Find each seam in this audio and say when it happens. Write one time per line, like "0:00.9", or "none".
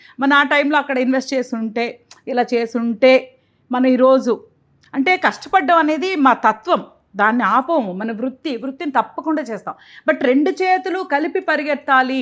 none